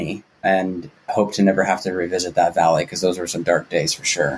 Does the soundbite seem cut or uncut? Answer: uncut